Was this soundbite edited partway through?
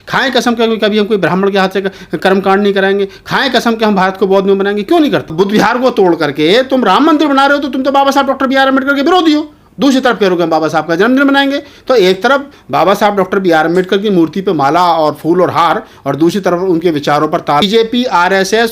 yes; 2 cuts; at 5.3 s, 17.6 s

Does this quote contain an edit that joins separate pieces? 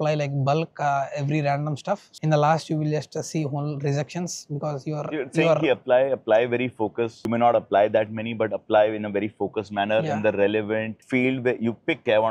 no; 0 cuts

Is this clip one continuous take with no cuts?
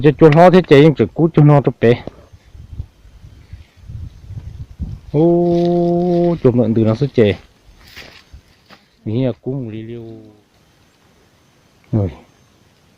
no; 1 cut; at 10.2 s

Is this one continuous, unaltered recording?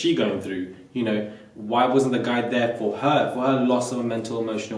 yes; 0 cuts

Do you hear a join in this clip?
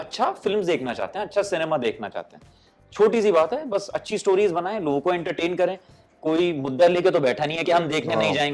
no; 0 cuts

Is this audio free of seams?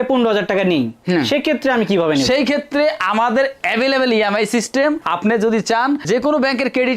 yes; 0 cuts

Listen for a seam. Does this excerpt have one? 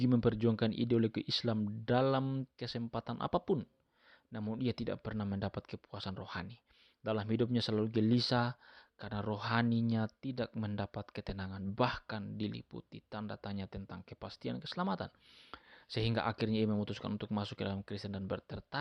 no; 0 cuts

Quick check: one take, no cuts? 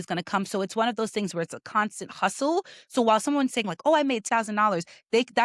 no; 1 cut; at 4.3 s

